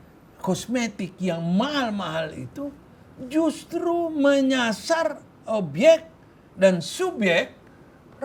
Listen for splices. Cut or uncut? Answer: uncut